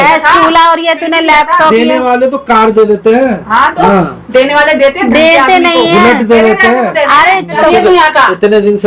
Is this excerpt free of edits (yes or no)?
no